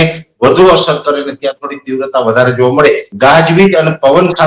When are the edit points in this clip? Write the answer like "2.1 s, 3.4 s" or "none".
3.1 s